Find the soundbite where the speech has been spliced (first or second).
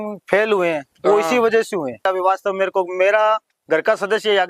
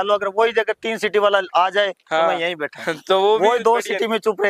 first